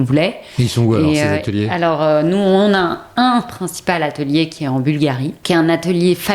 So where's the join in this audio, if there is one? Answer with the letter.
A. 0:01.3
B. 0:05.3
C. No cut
B